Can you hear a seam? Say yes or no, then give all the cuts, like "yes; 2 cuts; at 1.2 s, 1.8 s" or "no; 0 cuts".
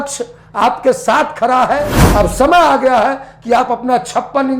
yes; 1 cut; at 2.0 s